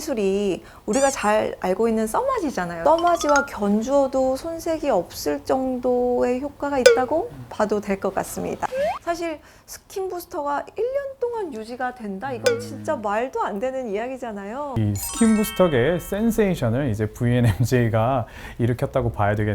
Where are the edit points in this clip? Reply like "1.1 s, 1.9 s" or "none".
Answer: 2.7 s, 8.7 s, 14.7 s